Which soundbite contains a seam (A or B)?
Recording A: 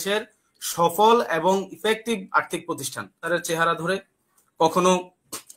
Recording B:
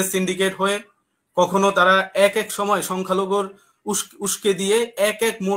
A